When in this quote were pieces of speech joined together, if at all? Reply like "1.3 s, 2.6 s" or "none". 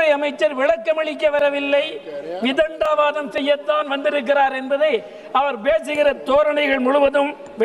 none